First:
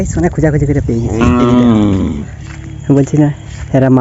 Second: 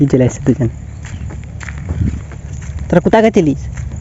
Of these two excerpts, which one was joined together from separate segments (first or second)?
second